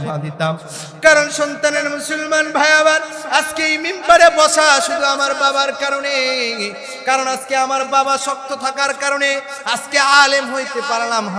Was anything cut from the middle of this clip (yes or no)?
no